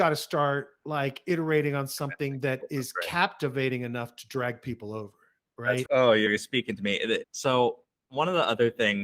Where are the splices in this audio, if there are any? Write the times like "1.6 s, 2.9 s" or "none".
5.8 s, 7.3 s

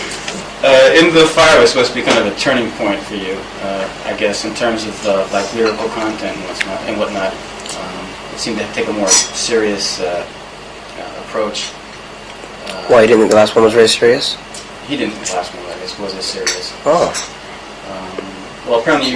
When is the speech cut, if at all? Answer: none

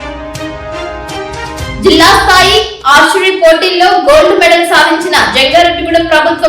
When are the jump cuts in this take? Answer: 1.5 s

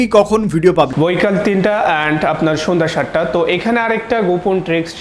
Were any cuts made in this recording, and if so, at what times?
0.9 s

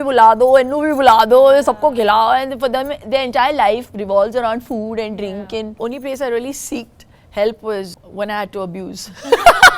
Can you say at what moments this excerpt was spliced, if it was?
5.8 s, 7.9 s

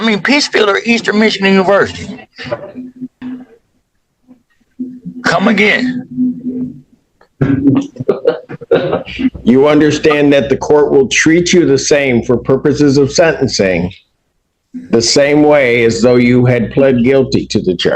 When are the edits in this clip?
3.1 s

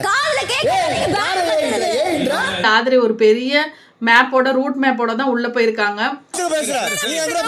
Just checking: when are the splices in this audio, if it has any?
2.6 s, 6.2 s

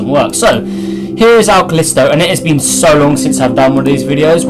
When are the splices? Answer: 3.0 s

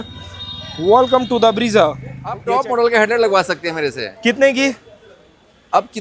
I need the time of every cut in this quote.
2.3 s

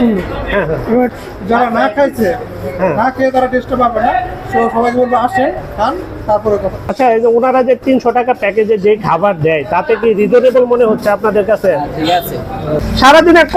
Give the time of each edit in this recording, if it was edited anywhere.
1.1 s, 6.9 s, 12.7 s

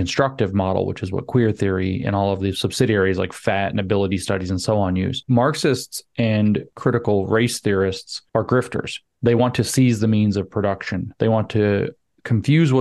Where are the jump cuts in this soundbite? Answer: 5.2 s, 6.7 s, 8.1 s

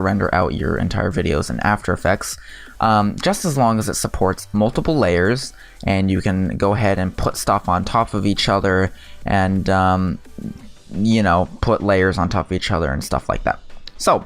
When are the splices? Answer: 11.2 s

